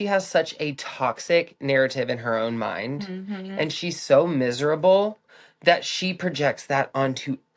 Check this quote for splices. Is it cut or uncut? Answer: uncut